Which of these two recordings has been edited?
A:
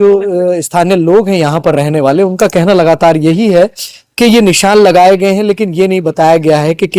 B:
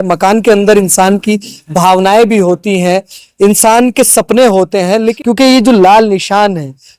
B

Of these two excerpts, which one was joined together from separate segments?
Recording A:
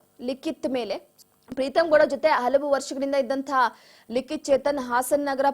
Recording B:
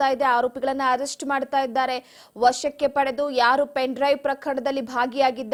A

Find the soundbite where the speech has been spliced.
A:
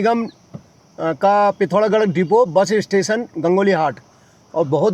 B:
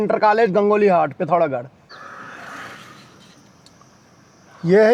B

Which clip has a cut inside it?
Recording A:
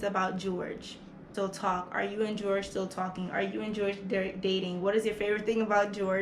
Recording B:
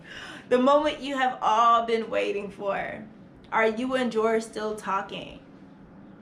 A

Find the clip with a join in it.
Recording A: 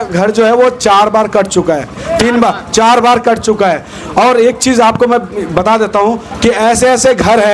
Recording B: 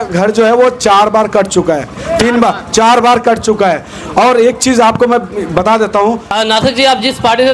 B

